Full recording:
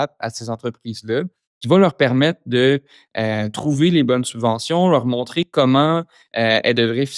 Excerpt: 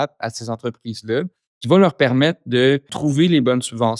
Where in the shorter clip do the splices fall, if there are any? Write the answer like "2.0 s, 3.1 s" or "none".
2.9 s